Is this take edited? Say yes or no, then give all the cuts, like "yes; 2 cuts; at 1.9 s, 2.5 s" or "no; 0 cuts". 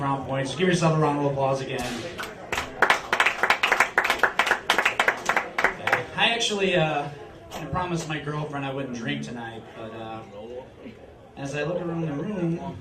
yes; 1 cut; at 9.6 s